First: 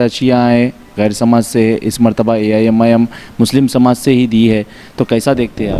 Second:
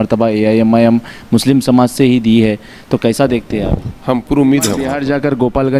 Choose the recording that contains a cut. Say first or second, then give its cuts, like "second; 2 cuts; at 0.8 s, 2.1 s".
second; 1 cut; at 4.9 s